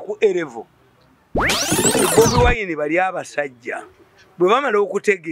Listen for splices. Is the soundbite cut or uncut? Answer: cut